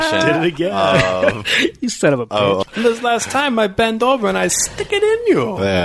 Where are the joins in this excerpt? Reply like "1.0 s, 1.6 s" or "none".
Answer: 2.6 s